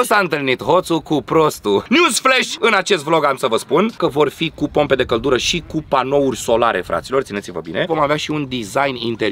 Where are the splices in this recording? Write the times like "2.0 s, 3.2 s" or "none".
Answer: 1.9 s, 7.9 s